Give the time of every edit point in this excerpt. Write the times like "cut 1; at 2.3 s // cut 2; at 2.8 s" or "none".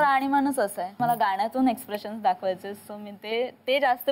cut 1; at 0.9 s